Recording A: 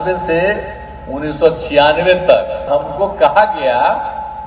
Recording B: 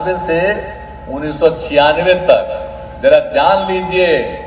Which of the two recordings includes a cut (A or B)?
A